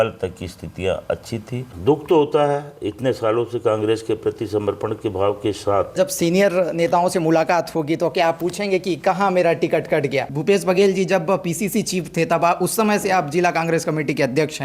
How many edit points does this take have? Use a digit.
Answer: 3